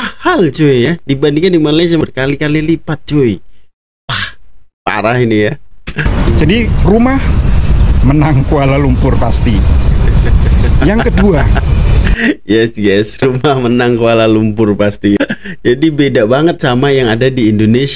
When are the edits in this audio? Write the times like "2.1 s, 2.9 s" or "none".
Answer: 2.0 s, 6.3 s, 15.2 s